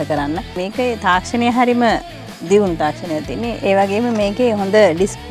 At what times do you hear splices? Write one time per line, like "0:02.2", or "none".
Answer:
0:03.5